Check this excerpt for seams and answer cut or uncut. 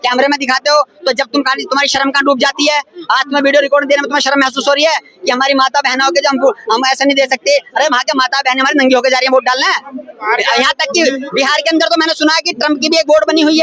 cut